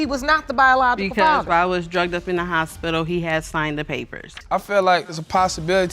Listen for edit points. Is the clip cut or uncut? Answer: cut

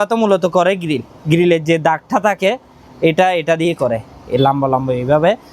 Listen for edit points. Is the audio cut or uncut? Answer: uncut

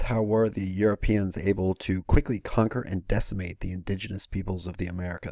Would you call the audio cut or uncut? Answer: uncut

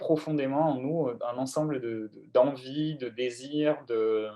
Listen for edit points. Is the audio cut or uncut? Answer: uncut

